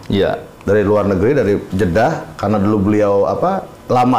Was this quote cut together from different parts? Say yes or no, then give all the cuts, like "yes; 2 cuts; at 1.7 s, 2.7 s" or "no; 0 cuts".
yes; 1 cut; at 1.7 s